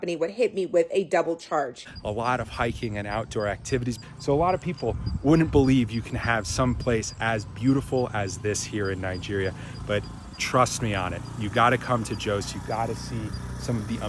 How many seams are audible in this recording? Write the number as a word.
two